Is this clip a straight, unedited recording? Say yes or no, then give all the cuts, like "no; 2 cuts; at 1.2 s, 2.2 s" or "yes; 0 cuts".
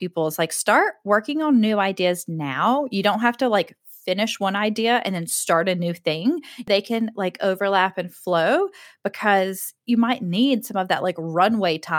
no; 1 cut; at 6.7 s